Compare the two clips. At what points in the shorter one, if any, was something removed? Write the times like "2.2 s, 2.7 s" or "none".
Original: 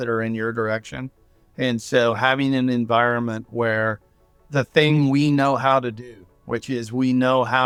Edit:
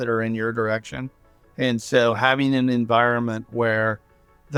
none

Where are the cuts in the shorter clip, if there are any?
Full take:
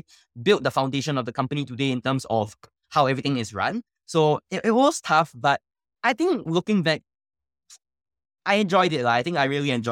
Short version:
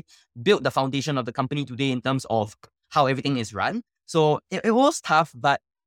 none

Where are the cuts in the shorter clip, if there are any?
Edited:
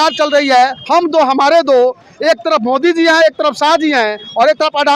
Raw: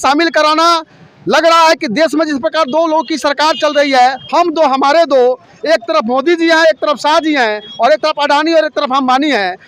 none

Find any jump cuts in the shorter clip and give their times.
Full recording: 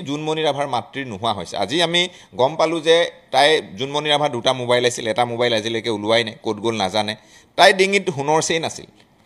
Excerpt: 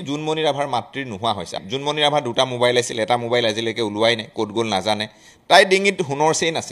1.6 s

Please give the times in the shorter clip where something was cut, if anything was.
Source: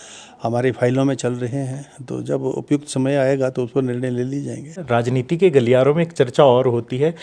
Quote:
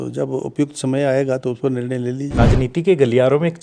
2.4 s

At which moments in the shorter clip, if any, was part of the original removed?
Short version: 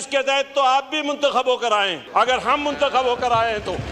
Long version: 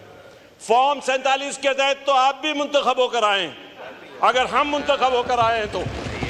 2.0 s

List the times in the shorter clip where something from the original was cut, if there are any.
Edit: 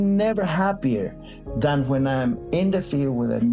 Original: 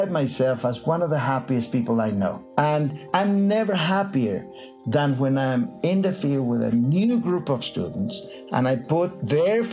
none

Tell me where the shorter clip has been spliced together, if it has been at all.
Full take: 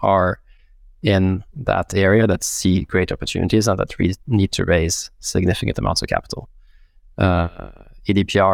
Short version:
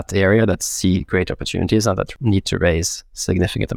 2.1 s

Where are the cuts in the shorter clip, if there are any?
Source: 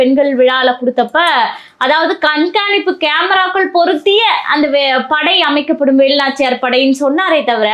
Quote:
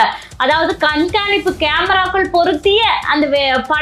none

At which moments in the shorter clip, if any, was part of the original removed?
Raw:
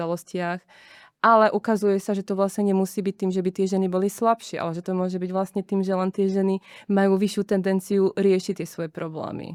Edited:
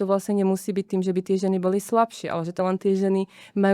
2.6 s

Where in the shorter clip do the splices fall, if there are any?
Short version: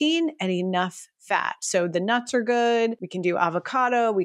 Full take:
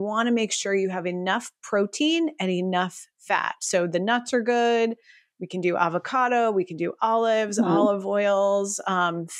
3.1 s

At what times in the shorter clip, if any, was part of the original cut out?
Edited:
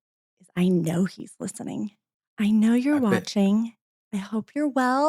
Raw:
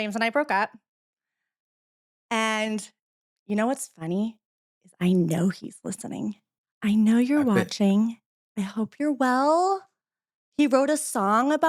none

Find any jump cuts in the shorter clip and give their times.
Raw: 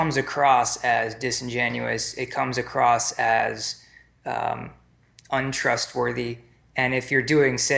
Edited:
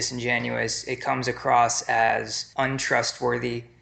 2.4 s

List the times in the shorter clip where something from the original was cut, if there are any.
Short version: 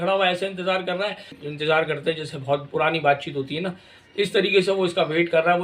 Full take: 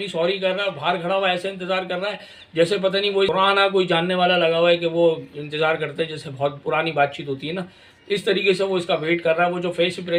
1.4 s

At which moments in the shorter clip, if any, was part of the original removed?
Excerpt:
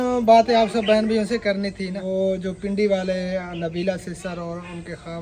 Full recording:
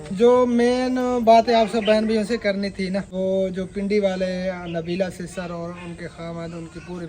2.0 s

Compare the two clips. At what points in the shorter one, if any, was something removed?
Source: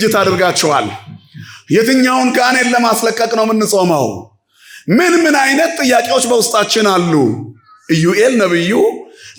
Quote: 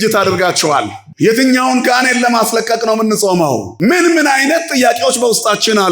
1.0 s, 3.7 s

